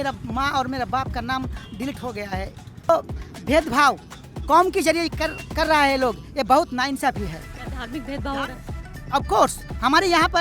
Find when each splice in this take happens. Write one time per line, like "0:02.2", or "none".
0:02.9